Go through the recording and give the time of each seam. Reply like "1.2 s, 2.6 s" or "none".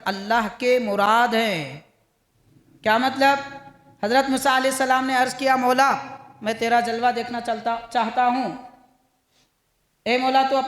none